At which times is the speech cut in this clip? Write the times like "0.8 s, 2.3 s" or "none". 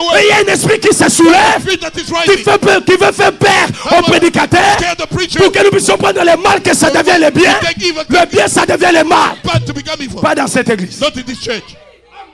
none

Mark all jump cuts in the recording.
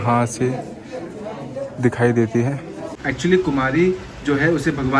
3.0 s

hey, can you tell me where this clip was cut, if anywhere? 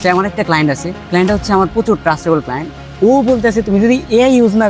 0.9 s, 2.8 s

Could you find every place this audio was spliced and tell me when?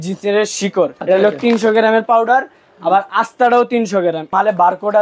1.0 s, 4.3 s

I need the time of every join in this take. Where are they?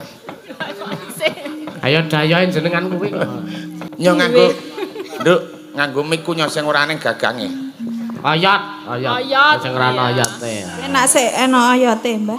3.8 s

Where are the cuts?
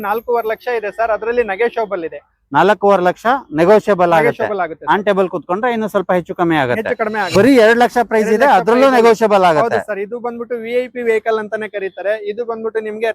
7.3 s

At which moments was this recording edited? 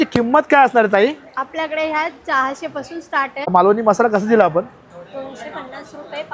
3.5 s

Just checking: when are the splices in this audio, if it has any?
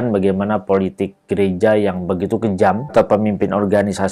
2.9 s

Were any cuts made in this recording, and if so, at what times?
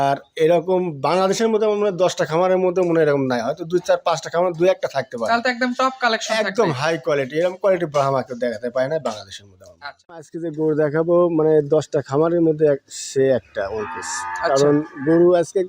10.2 s, 11.1 s

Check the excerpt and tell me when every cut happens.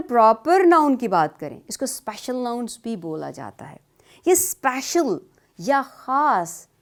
none

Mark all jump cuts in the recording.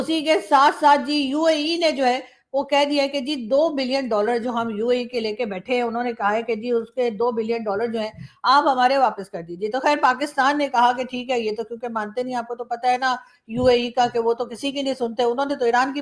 none

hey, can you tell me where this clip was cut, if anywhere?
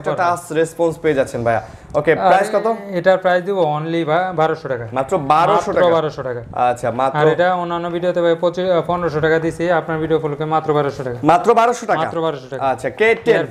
none

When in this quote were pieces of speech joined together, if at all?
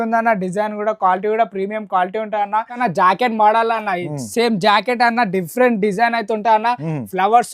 2.8 s

